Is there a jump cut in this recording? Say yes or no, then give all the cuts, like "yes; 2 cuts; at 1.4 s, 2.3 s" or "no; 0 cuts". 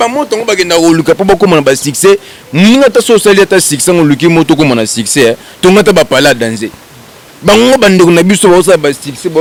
no; 0 cuts